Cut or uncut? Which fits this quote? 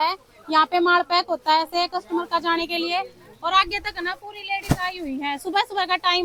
uncut